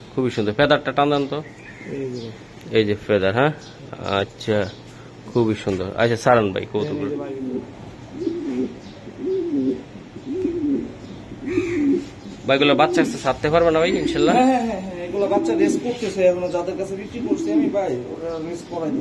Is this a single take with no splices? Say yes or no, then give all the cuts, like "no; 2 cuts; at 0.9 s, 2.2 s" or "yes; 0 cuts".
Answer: no; 1 cut; at 7.2 s